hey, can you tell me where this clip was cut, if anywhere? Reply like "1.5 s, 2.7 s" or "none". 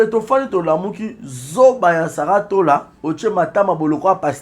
2.9 s